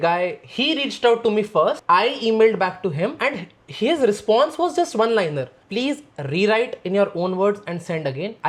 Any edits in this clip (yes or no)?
no